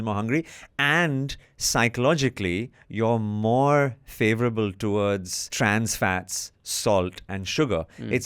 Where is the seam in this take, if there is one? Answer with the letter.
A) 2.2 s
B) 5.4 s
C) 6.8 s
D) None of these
B